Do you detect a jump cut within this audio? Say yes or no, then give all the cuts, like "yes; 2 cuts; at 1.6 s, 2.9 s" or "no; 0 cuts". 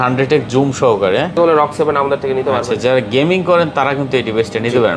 yes; 1 cut; at 1.4 s